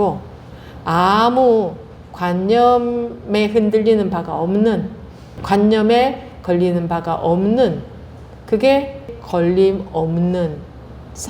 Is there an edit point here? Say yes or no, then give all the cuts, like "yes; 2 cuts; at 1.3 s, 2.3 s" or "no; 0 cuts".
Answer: yes; 2 cuts; at 5.4 s, 9.2 s